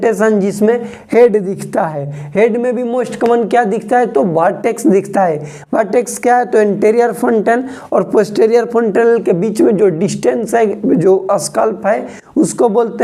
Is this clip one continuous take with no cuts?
yes; 0 cuts

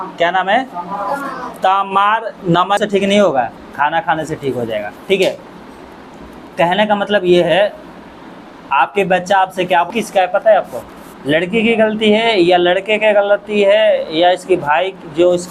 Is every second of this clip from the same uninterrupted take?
no; 2 cuts; at 2.8 s, 9.9 s

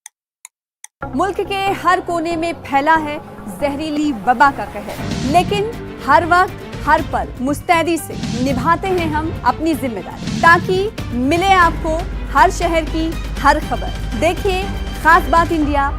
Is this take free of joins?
no; 1 cut; at 0.9 s

